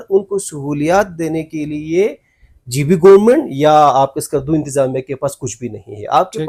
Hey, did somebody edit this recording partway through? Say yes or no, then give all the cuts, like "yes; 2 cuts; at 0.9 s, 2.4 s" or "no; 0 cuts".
no; 0 cuts